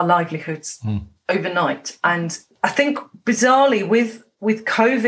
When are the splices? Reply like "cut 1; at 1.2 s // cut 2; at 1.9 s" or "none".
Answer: cut 1; at 2.3 s